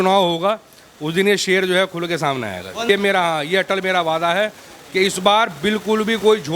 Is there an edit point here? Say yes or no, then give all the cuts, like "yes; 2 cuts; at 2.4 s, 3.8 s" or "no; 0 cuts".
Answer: yes; 1 cut; at 2.8 s